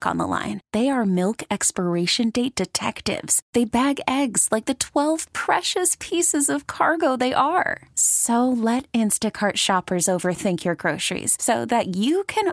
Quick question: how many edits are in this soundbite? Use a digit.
0